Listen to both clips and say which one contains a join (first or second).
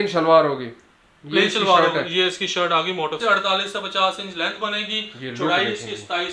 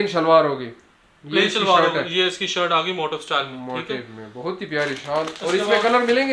first